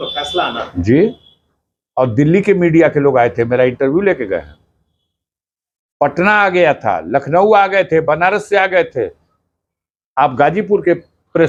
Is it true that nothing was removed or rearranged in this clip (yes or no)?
yes